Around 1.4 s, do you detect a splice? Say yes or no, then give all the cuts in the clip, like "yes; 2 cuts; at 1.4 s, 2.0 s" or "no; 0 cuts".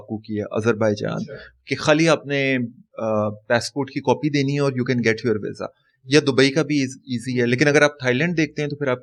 no; 0 cuts